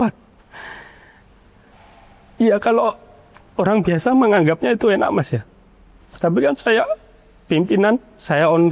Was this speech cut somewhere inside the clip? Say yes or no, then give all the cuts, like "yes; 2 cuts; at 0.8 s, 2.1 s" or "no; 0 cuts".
no; 0 cuts